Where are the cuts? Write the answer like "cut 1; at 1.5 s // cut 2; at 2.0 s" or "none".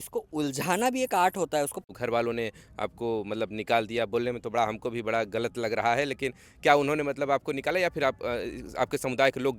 cut 1; at 1.9 s